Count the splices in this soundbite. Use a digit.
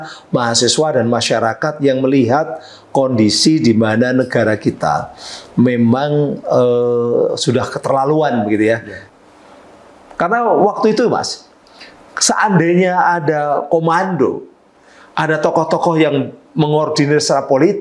1